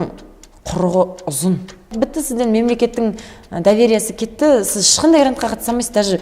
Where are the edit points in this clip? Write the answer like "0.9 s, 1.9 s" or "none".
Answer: 1.9 s